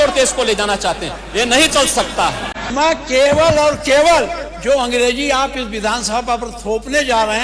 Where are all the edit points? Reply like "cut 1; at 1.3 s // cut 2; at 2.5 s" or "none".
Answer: cut 1; at 2.6 s

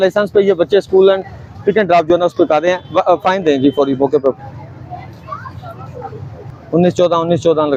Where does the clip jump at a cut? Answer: none

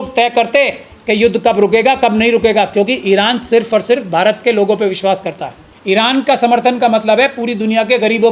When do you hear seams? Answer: cut 1; at 5.7 s

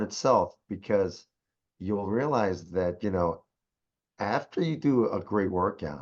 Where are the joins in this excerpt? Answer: none

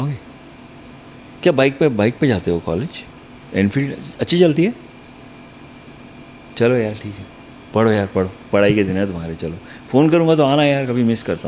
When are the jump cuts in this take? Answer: none

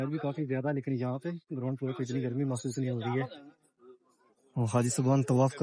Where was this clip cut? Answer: none

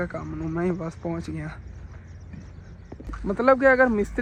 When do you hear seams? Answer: none

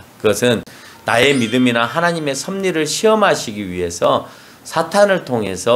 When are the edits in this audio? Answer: none

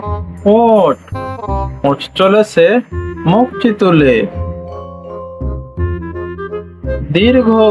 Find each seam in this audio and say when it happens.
none

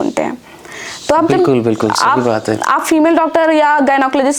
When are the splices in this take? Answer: none

